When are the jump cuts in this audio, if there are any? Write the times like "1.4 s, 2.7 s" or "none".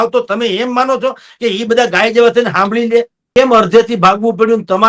3.2 s